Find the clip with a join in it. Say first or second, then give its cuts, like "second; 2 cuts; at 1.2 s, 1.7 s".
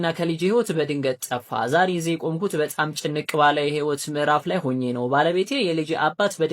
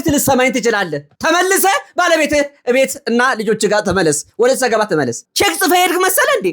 second; 1 cut; at 5.2 s